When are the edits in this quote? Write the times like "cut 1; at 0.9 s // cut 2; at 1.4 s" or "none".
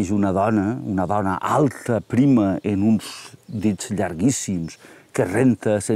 none